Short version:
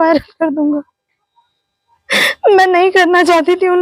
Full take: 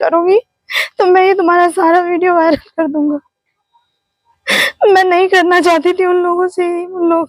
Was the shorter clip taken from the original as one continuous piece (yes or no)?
yes